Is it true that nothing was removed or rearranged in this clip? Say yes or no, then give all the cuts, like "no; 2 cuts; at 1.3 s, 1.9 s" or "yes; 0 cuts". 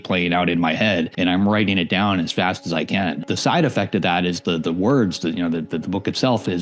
no; 2 cuts; at 1.1 s, 3.2 s